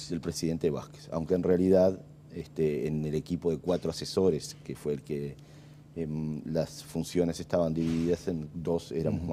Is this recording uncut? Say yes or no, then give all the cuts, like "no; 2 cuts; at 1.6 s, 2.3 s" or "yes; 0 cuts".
yes; 0 cuts